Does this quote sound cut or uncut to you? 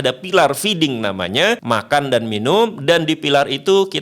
cut